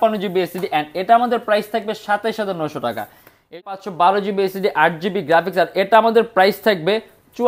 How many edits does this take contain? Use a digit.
1